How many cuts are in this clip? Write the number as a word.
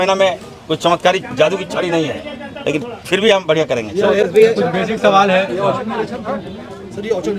zero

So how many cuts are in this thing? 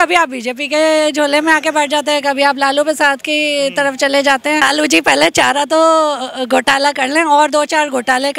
one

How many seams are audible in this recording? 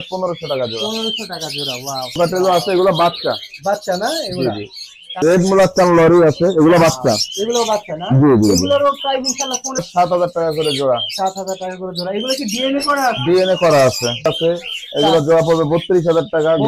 four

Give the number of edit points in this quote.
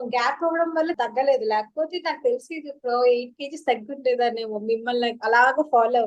one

